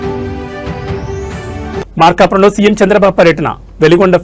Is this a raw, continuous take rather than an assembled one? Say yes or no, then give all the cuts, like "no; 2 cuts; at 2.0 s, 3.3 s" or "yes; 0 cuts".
no; 1 cut; at 1.9 s